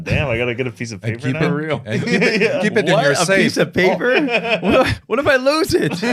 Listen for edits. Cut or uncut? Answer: uncut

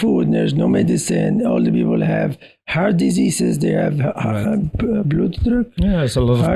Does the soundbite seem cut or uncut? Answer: uncut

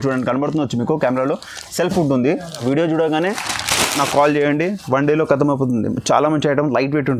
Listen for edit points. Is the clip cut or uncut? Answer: cut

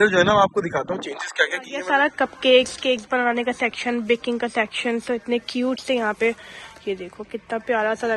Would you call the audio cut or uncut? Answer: cut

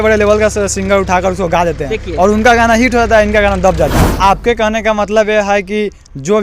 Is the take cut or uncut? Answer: cut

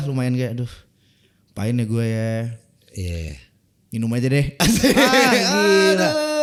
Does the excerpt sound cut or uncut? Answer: uncut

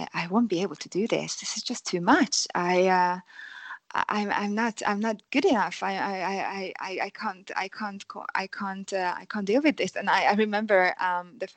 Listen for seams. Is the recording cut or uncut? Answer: uncut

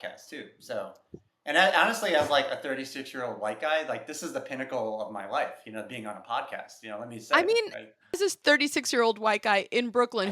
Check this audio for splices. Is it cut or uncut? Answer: cut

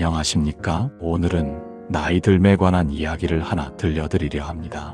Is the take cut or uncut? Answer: cut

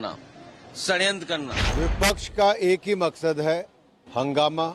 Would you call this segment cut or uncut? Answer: cut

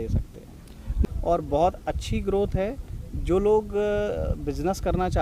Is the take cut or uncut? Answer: cut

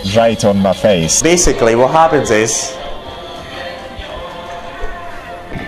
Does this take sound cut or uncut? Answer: cut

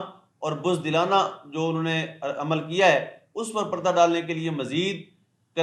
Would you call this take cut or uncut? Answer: uncut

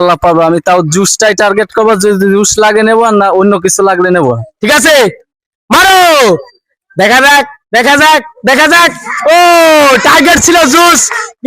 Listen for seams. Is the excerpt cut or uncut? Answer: cut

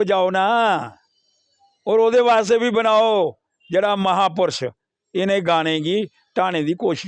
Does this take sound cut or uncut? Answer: uncut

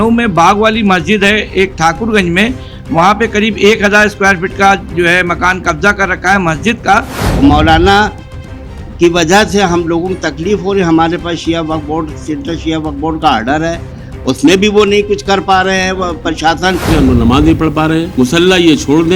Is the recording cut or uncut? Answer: cut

